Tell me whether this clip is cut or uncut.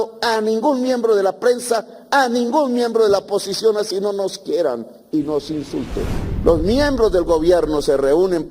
cut